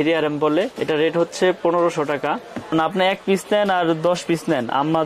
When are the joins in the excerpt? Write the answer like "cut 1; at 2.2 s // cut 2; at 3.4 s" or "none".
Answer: cut 1; at 2.7 s